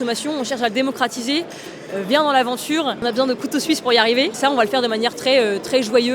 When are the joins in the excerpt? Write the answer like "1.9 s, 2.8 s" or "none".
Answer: 3.0 s, 4.4 s